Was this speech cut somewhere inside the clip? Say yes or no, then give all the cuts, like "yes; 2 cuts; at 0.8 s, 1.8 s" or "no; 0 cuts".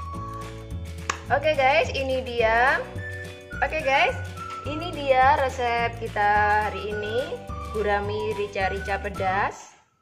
yes; 1 cut; at 1.0 s